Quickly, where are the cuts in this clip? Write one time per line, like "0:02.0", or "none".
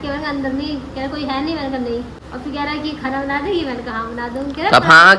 0:02.2